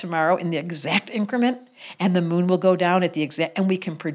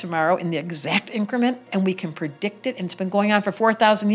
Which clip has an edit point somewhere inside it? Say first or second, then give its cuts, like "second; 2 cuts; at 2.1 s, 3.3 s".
second; 1 cut; at 1.7 s